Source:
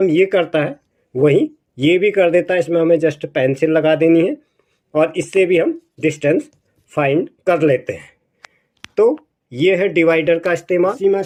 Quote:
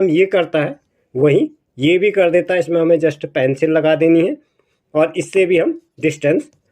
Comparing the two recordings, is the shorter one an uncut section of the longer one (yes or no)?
yes